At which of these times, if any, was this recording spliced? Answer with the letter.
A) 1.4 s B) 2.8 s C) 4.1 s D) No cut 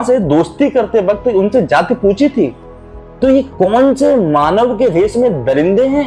D